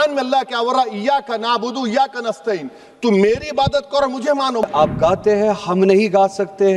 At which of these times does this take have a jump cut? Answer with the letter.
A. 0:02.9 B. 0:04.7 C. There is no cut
B